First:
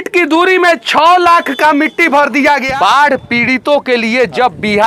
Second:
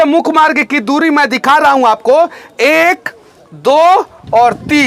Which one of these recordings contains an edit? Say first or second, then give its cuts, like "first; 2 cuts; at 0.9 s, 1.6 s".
first; 1 cut; at 2.7 s